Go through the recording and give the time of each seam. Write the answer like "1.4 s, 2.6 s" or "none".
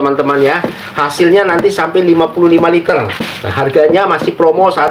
none